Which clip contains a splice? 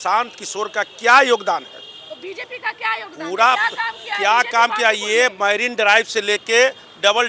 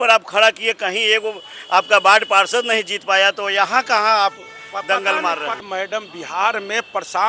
second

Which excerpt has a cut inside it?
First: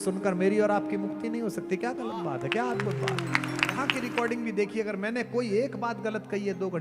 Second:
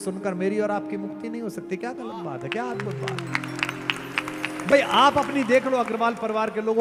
first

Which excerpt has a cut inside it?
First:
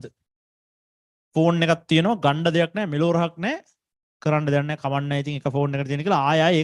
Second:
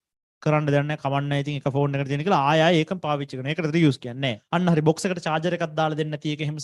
second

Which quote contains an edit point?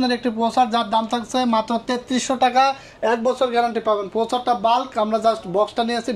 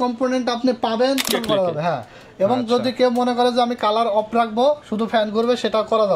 second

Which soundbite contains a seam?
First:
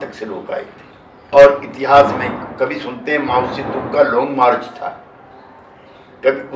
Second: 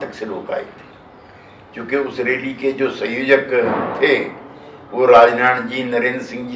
first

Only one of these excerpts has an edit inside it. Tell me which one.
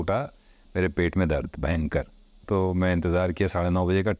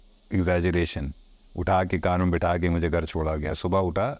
first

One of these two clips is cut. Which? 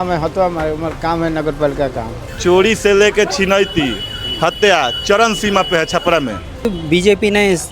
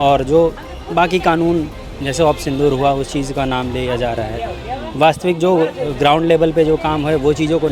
first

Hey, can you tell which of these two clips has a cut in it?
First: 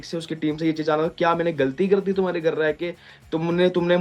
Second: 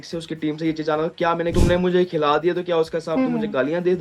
second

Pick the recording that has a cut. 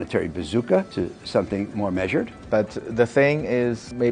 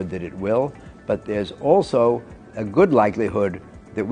first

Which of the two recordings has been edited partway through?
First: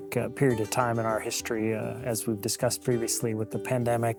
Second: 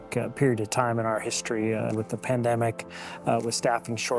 second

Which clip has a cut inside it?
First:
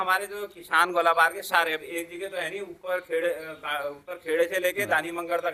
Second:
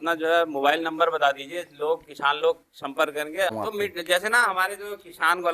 second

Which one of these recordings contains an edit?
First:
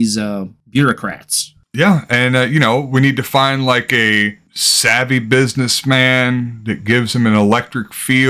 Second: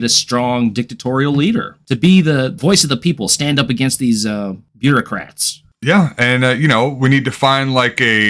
second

